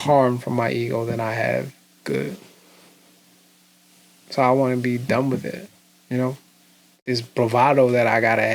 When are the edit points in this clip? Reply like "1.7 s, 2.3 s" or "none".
6.9 s